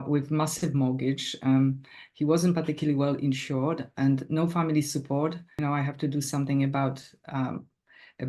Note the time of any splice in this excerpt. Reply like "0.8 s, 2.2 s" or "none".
5.6 s